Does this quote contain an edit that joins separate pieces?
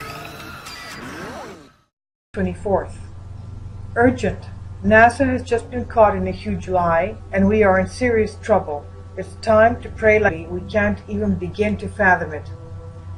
no; 0 cuts

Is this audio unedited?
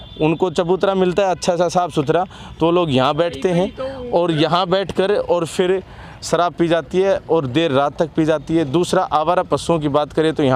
yes; 0 cuts

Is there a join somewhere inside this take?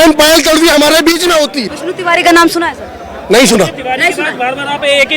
yes; 1 cut; at 1.7 s

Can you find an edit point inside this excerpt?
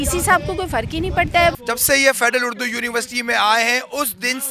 yes; 1 cut; at 1.6 s

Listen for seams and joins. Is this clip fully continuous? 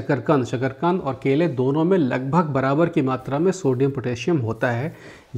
yes; 0 cuts

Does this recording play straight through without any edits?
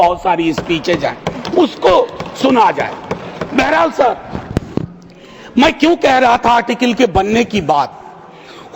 yes; 0 cuts

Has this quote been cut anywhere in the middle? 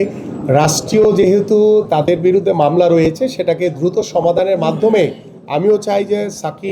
no; 0 cuts

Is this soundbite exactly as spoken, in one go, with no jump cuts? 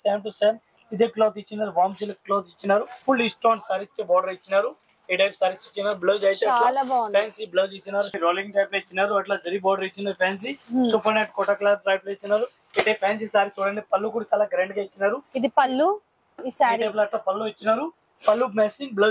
no; 3 cuts; at 2.9 s, 8.1 s, 12.6 s

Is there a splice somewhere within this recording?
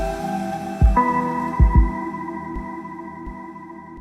no; 0 cuts

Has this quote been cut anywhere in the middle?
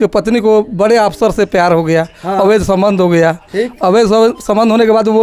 no; 0 cuts

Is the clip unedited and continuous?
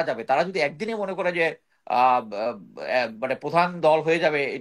yes; 0 cuts

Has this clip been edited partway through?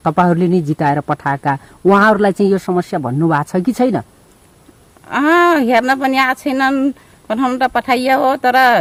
no; 0 cuts

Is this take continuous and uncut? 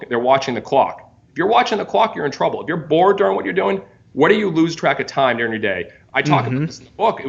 no; 1 cut; at 5.9 s

